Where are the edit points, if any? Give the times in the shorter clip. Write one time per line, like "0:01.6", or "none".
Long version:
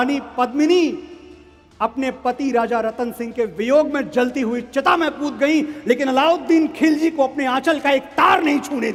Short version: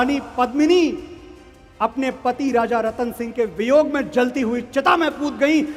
none